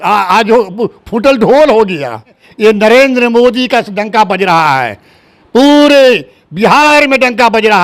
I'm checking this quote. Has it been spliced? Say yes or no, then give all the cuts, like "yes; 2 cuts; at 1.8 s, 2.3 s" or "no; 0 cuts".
yes; 1 cut; at 2.4 s